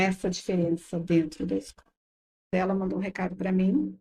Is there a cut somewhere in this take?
yes; 1 cut; at 2.5 s

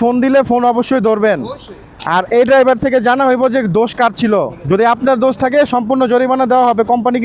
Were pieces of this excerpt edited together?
no; 0 cuts

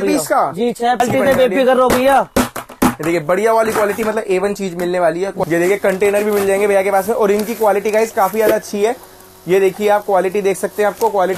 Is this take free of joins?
no; 2 cuts; at 1.0 s, 5.4 s

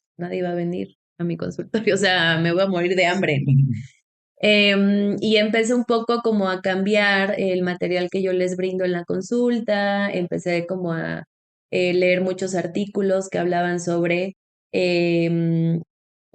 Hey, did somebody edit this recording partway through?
no; 0 cuts

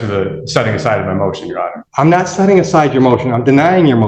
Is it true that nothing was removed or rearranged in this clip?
no; 1 cut; at 1.8 s

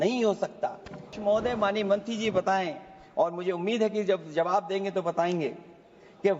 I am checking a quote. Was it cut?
yes; 1 cut; at 1.1 s

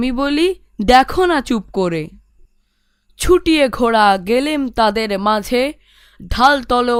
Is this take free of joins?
yes; 0 cuts

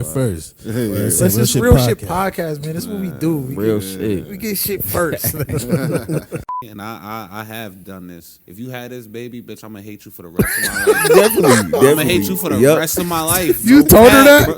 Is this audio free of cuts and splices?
no; 2 cuts; at 6.6 s, 8.3 s

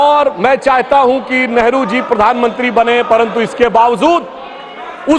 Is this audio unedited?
yes; 0 cuts

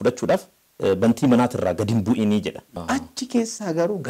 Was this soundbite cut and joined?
yes; 1 cut; at 2.7 s

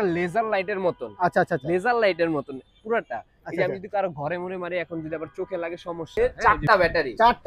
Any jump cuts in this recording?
yes; 1 cut; at 6.0 s

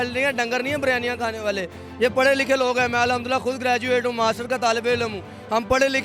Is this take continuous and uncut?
yes; 0 cuts

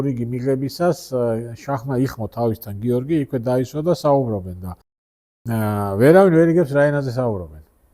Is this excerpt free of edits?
yes; 0 cuts

